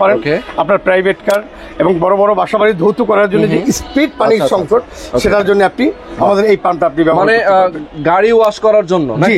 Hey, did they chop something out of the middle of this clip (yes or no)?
no